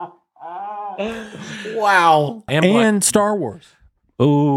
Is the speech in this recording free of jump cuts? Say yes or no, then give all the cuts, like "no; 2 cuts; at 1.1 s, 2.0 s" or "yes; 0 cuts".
no; 1 cut; at 2.4 s